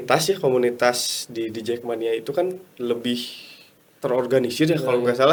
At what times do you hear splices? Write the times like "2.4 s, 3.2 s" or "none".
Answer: none